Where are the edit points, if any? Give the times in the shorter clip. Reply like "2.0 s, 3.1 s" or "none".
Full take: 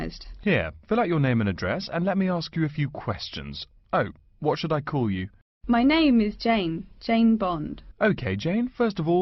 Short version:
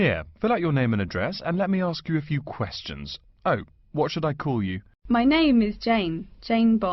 4.9 s